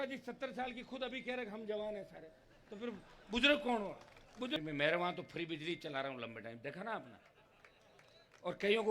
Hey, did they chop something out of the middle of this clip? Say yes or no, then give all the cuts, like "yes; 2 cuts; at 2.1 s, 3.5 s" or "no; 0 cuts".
yes; 1 cut; at 4.6 s